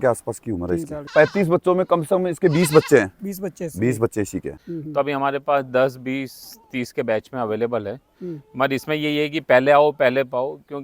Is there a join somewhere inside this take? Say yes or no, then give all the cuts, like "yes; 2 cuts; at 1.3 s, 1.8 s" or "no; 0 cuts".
yes; 2 cuts; at 1.0 s, 4.6 s